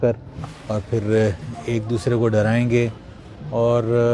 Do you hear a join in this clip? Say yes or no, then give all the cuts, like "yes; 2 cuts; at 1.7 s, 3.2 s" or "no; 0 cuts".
no; 0 cuts